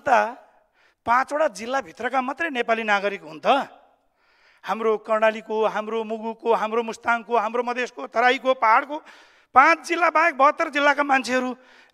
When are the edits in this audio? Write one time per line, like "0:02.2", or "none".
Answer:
none